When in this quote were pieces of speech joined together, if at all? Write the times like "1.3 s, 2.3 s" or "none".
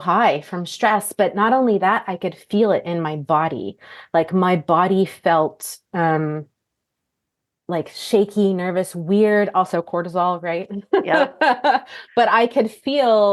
none